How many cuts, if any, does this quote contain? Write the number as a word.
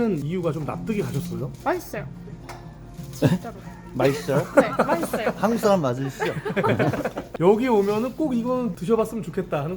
one